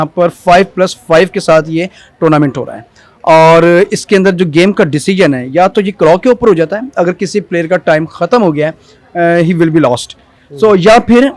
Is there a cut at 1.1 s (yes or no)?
no